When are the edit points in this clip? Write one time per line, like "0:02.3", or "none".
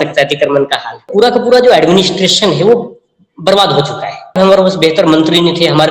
0:01.1
0:04.3